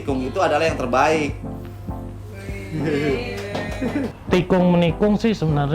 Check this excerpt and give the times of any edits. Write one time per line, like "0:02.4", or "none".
0:04.2

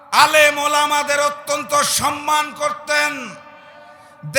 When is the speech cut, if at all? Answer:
none

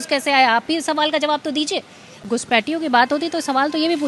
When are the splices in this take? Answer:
0:02.2

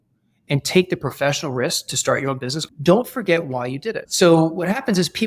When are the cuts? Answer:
0:02.6
0:04.0

